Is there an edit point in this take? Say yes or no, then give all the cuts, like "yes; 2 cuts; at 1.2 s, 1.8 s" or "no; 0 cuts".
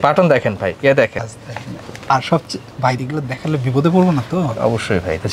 no; 0 cuts